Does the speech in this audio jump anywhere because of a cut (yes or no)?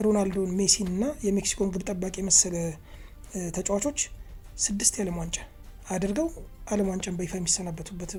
no